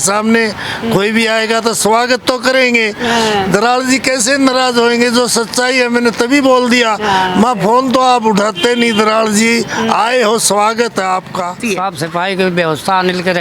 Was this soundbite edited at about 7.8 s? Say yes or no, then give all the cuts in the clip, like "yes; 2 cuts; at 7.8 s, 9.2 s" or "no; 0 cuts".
no; 1 cut; at 11.6 s